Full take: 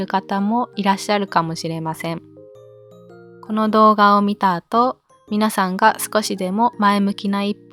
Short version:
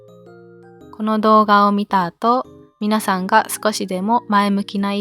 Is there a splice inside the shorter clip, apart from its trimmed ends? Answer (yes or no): no